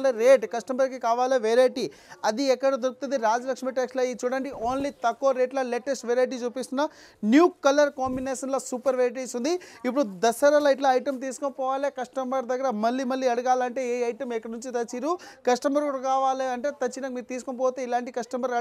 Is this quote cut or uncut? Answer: uncut